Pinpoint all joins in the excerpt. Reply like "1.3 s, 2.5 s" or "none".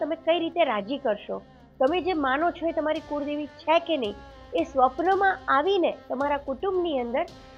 none